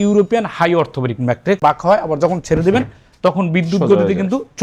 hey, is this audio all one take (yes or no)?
no